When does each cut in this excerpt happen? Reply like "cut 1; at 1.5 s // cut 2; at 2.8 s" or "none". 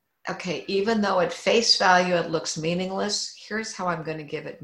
none